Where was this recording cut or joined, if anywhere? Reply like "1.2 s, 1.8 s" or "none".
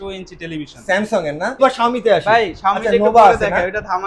1.6 s